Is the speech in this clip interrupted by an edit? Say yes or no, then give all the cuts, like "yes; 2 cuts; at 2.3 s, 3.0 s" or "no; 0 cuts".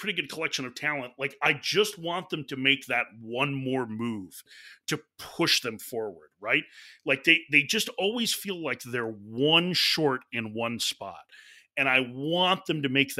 no; 0 cuts